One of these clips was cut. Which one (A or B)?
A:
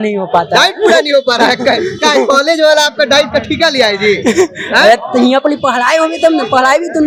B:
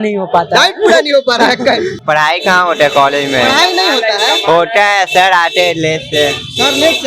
B